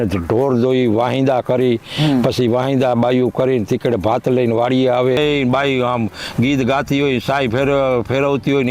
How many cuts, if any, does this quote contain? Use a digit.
1